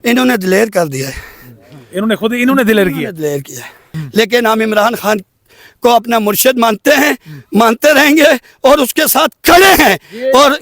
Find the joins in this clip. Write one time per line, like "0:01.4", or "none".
0:04.0